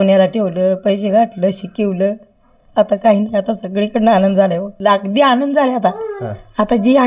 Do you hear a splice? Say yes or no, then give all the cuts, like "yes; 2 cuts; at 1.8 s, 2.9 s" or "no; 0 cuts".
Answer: yes; 1 cut; at 4.7 s